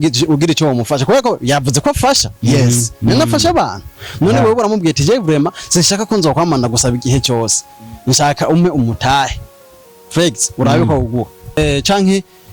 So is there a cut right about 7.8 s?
no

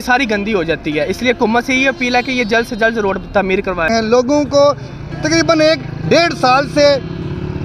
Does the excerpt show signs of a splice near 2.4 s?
no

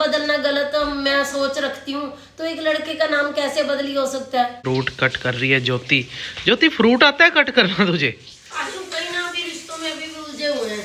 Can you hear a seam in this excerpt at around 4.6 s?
yes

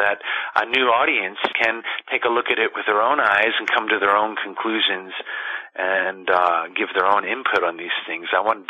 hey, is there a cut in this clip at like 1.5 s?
yes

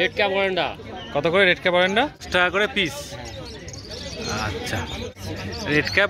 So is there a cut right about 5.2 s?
yes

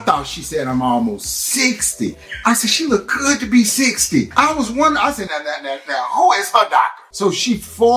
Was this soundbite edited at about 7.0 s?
yes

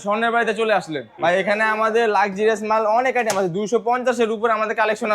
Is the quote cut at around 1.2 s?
yes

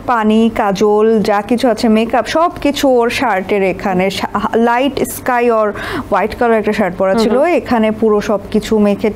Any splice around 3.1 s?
no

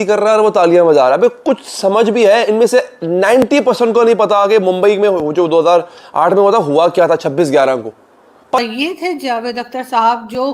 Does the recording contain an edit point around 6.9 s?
no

